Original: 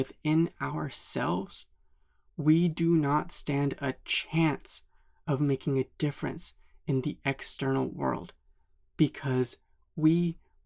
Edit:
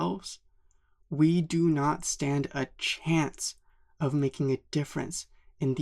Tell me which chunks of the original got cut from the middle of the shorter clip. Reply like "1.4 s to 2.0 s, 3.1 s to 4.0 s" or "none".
none